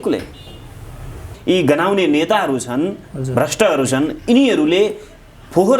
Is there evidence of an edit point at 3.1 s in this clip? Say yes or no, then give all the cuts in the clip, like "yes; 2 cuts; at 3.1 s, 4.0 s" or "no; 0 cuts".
no; 1 cut; at 1.3 s